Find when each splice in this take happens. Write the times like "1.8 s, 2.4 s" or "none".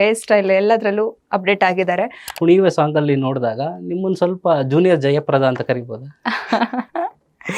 2.4 s